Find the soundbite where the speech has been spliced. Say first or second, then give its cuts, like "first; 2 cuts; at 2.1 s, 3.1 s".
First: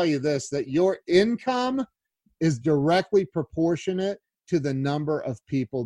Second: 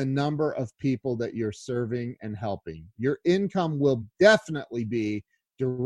second; 1 cut; at 4.0 s